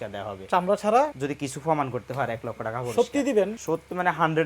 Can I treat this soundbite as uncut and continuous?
no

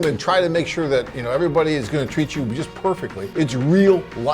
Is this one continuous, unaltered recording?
no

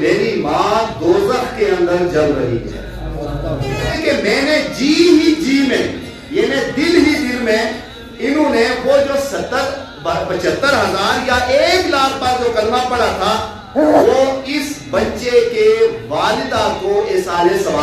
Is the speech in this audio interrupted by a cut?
yes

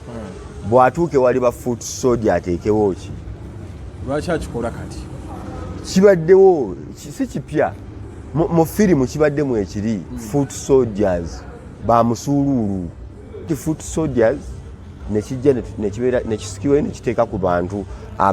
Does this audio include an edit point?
yes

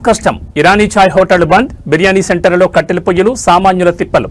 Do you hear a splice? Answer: no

